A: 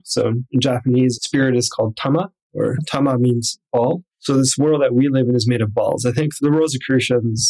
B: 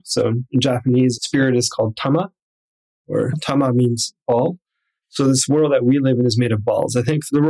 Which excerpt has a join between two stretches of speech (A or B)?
A